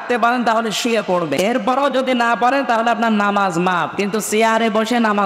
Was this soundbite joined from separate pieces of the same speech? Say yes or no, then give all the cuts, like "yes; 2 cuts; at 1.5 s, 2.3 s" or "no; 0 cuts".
yes; 1 cut; at 1.3 s